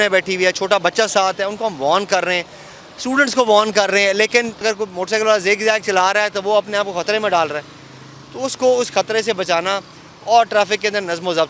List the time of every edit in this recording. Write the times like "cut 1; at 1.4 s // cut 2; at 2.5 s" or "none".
cut 1; at 4.6 s